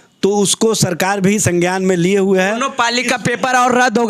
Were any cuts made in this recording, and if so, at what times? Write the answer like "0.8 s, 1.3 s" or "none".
none